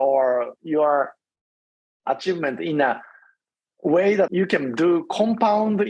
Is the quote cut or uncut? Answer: cut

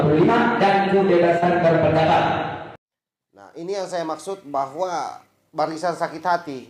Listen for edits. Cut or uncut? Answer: cut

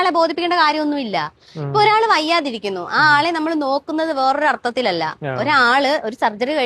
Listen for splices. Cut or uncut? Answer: uncut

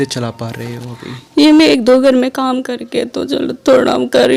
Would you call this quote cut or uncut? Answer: uncut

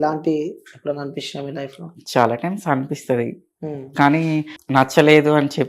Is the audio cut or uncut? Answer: cut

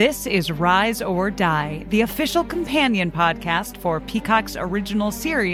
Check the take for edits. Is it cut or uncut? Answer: uncut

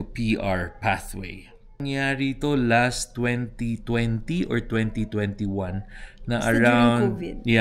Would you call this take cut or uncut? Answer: cut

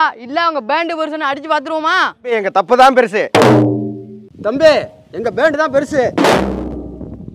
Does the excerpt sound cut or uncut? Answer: cut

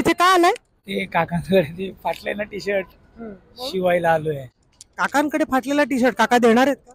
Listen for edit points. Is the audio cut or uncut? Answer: uncut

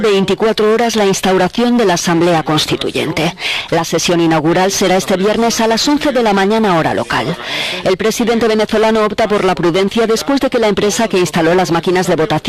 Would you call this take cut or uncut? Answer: uncut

